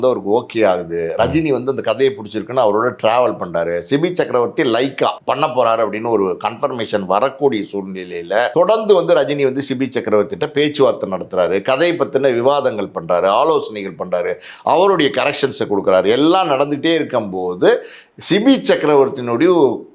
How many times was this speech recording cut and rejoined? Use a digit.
2